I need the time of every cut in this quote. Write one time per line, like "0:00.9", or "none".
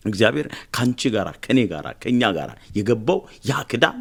none